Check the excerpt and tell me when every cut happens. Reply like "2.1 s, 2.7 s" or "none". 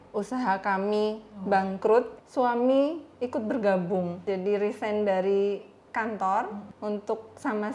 1.3 s, 2.1 s, 4.2 s, 6.6 s